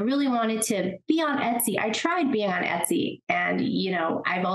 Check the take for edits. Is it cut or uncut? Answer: uncut